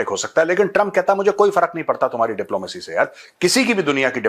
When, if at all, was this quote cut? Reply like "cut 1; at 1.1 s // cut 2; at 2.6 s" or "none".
none

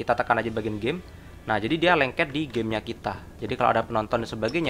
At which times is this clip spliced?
none

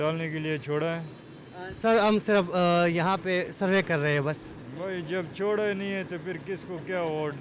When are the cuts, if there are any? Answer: none

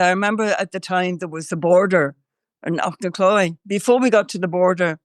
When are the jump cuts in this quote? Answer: cut 1; at 3.6 s

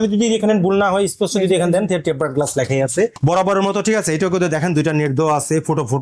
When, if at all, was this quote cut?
cut 1; at 3.2 s

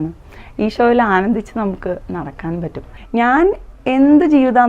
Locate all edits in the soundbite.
cut 1; at 2.9 s

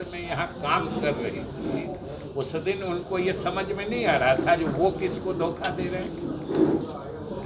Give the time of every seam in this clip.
none

